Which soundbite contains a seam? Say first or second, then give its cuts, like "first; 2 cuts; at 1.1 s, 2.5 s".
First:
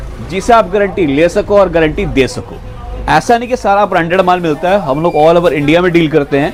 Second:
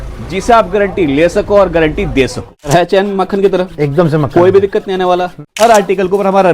second; 2 cuts; at 2.7 s, 5.5 s